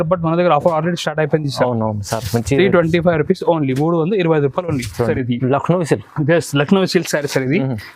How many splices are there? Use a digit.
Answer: 1